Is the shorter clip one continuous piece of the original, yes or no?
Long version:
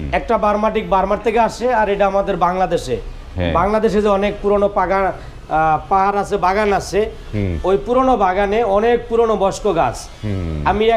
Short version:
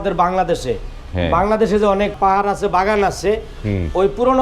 no